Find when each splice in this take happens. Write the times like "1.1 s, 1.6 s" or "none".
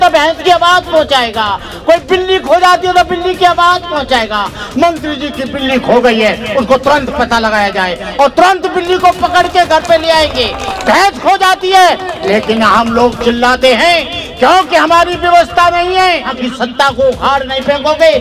16.4 s